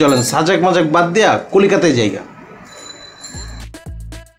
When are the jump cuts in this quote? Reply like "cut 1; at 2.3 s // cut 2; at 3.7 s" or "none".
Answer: none